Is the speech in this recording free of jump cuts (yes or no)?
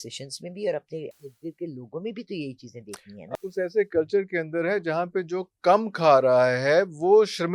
no